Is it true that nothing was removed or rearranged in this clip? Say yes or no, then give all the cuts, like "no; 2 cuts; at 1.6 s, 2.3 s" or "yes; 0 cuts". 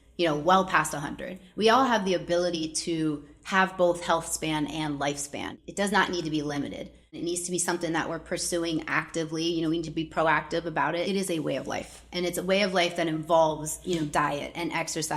no; 3 cuts; at 5.6 s, 7.2 s, 11.1 s